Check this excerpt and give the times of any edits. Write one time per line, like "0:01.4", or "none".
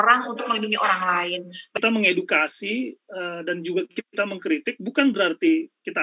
0:01.8